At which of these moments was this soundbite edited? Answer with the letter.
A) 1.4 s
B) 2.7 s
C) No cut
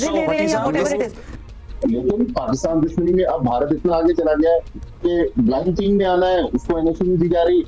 A